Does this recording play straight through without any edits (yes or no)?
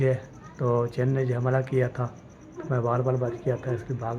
yes